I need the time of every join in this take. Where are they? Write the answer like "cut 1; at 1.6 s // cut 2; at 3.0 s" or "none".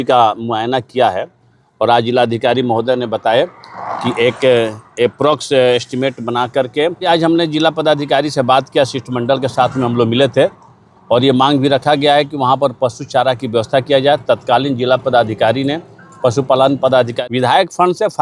cut 1; at 7.1 s // cut 2; at 17.1 s